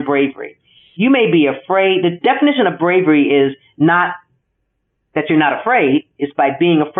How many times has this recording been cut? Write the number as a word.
zero